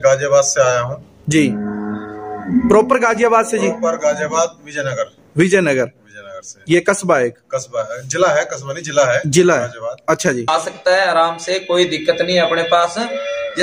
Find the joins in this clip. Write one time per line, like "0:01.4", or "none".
0:10.5